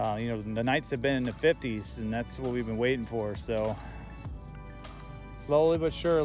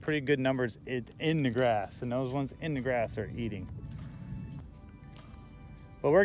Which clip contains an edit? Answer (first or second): second